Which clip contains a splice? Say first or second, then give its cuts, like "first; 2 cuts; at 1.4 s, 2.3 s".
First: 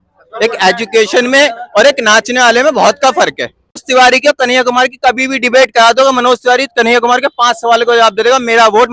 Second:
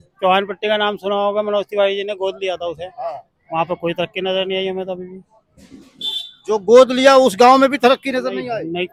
first; 1 cut; at 3.8 s